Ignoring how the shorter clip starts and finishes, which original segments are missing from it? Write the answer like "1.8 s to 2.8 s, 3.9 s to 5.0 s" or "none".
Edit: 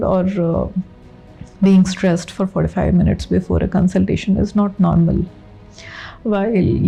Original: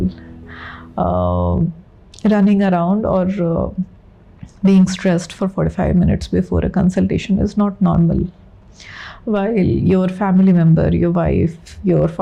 none